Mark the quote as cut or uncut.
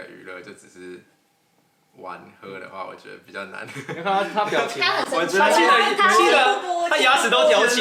uncut